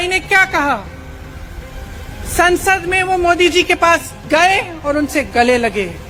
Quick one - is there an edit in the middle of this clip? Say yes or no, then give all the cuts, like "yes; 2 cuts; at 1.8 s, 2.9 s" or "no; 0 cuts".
no; 0 cuts